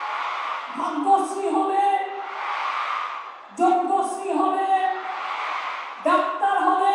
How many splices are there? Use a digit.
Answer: 0